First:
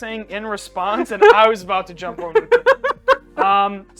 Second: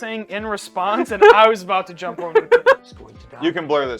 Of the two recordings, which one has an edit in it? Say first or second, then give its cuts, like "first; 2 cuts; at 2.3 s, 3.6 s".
second; 1 cut; at 2.8 s